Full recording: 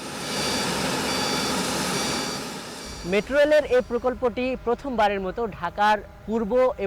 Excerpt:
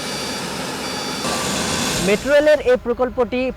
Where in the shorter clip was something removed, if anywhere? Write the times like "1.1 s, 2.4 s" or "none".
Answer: 1.4 s